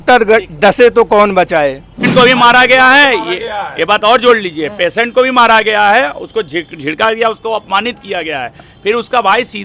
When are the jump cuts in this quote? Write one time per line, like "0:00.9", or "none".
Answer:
0:02.1